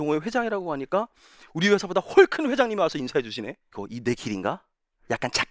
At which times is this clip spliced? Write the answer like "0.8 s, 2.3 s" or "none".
3.7 s